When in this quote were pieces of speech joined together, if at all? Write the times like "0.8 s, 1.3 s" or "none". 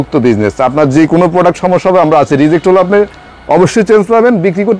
none